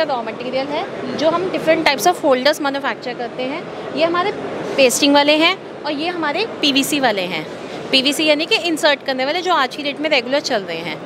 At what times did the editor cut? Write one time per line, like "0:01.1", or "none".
none